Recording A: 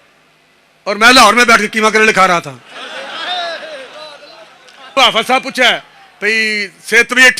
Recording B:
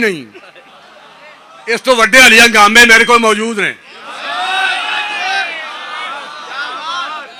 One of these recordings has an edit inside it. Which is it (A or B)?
A